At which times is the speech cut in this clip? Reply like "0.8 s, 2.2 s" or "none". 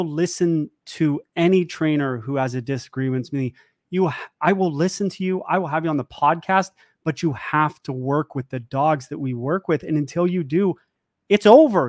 none